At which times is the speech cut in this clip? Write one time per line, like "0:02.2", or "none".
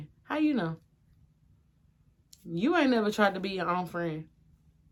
none